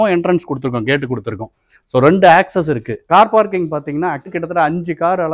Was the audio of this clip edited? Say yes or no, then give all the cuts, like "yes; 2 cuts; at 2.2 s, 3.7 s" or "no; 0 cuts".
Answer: yes; 2 cuts; at 2.9 s, 4.3 s